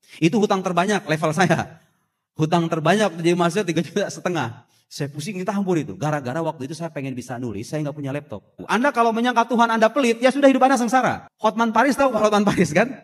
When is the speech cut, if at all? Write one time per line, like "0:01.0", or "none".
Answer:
0:08.6
0:11.3